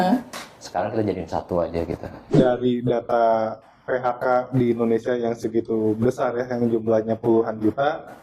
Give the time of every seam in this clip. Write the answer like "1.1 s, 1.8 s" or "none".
2.3 s

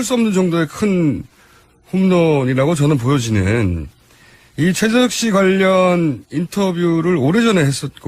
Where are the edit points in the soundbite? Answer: 1.9 s

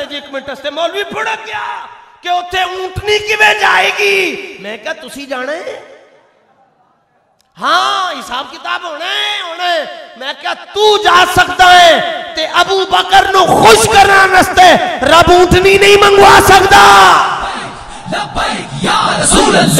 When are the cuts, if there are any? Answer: none

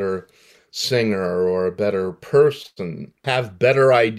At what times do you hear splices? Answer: 3.2 s

